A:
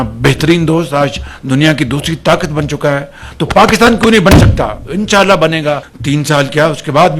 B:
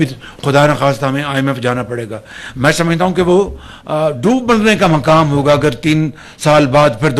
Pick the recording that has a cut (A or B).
A